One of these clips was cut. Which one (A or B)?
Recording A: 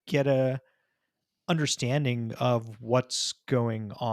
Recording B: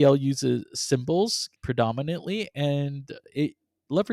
B